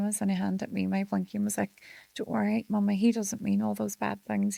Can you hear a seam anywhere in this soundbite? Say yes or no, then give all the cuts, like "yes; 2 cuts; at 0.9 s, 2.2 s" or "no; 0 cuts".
no; 0 cuts